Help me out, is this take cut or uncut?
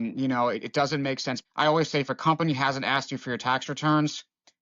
cut